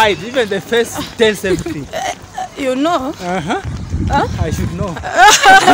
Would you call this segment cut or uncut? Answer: uncut